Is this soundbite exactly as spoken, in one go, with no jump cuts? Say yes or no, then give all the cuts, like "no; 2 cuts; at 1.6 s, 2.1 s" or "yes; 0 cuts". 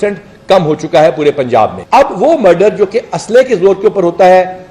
no; 1 cut; at 1.8 s